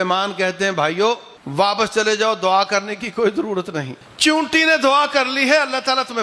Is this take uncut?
no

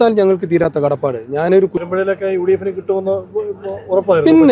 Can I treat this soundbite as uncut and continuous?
yes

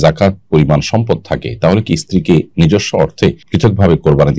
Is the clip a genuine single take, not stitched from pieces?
no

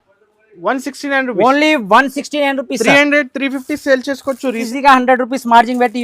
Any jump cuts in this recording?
yes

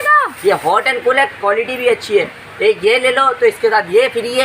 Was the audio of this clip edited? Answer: no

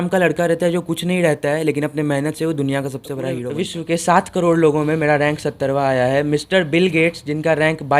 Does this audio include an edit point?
yes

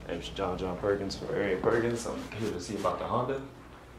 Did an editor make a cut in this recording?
no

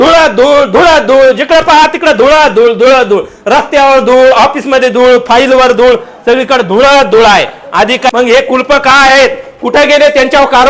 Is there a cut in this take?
yes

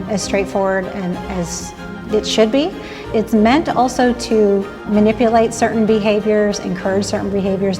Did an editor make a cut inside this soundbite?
yes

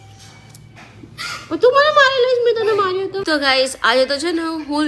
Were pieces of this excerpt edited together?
yes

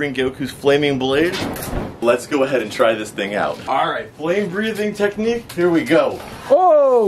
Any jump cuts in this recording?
no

